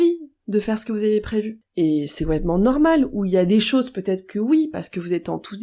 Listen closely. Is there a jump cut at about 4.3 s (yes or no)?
no